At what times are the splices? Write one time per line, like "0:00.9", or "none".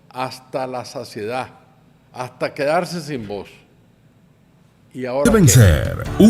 0:05.3